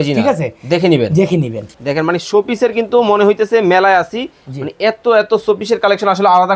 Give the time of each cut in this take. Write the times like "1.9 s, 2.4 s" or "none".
1.7 s